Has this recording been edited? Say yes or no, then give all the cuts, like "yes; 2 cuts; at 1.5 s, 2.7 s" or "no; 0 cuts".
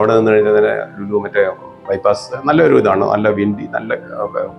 no; 0 cuts